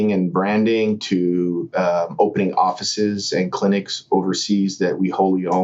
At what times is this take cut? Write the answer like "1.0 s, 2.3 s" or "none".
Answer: none